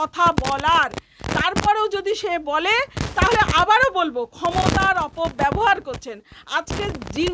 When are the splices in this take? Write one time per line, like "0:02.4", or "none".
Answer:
none